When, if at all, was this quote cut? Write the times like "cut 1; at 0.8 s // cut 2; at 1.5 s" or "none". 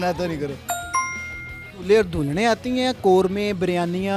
cut 1; at 1.3 s